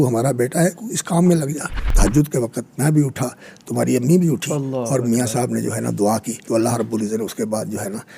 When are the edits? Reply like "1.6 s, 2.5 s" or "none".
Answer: 1.8 s, 6.5 s